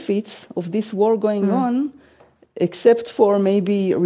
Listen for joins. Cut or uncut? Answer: uncut